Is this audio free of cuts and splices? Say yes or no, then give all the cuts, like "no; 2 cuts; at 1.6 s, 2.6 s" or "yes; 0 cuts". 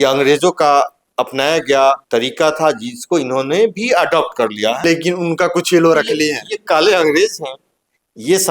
no; 3 cuts; at 1.0 s, 2.0 s, 4.8 s